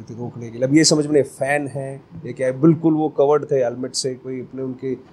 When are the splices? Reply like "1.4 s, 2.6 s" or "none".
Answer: none